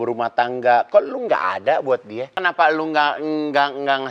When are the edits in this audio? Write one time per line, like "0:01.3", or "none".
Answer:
0:02.4